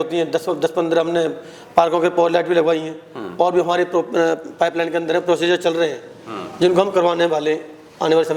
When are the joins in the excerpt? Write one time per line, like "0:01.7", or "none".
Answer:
none